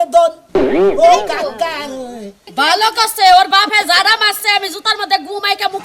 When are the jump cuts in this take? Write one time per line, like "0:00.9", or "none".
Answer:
0:02.6